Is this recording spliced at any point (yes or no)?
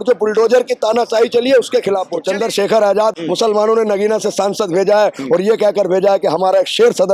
yes